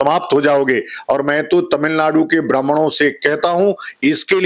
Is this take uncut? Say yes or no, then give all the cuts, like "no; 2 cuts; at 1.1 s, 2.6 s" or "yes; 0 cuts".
yes; 0 cuts